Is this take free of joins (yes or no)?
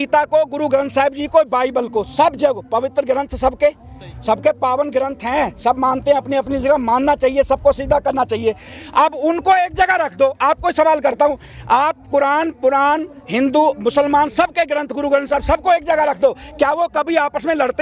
yes